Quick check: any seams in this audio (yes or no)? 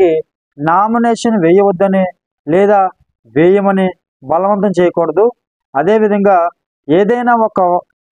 no